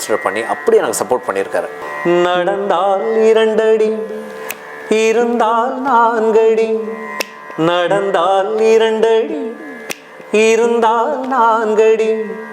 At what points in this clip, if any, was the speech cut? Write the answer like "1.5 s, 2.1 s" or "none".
1.8 s